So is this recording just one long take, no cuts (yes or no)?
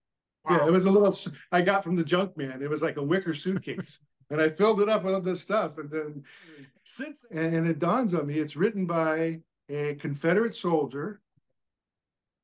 no